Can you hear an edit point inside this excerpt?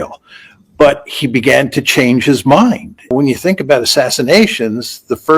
yes; 1 cut; at 3.1 s

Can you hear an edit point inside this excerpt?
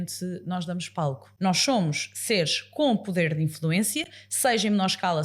yes; 1 cut; at 1.3 s

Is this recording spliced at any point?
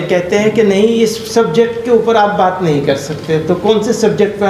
no; 0 cuts

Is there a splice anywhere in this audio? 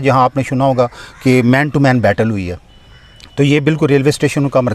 no; 0 cuts

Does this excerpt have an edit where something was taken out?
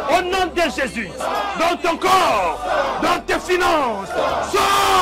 yes; 1 cut; at 1.1 s

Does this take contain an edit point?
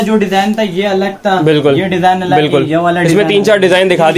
no; 0 cuts

